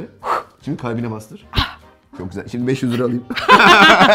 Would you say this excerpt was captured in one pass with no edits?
yes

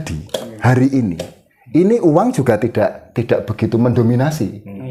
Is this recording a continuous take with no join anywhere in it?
yes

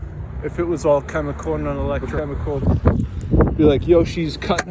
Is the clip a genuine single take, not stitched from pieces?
no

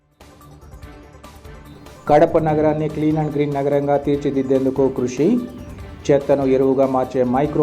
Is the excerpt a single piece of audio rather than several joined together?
no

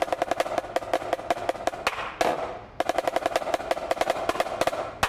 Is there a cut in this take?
no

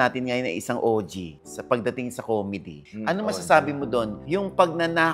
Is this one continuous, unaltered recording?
yes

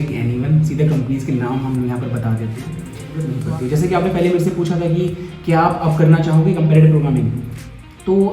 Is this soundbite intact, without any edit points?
no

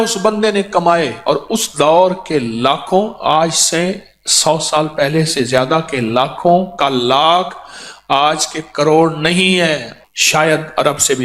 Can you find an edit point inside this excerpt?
yes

